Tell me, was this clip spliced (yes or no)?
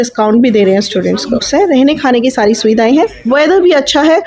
yes